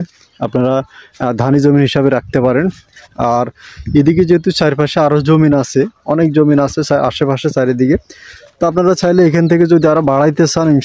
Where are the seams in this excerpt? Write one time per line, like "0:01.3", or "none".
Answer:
none